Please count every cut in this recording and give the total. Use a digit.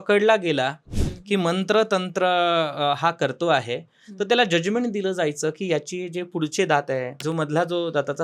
1